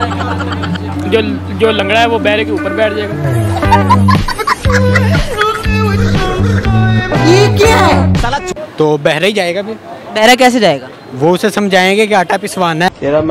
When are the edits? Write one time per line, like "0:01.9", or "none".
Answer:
0:08.6